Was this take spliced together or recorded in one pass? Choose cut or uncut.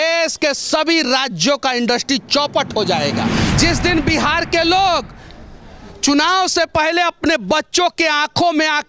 cut